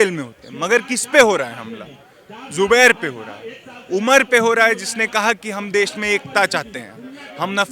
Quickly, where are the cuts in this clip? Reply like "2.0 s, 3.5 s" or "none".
none